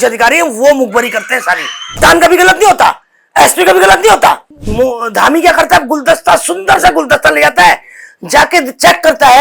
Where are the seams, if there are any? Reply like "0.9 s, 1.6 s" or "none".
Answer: 2.0 s, 4.5 s